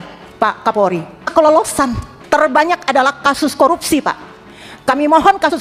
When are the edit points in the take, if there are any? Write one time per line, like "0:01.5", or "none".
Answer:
0:01.3
0:02.1